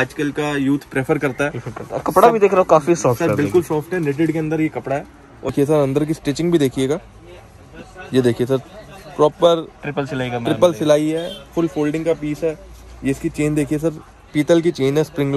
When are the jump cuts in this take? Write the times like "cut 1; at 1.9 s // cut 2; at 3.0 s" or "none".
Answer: cut 1; at 5.5 s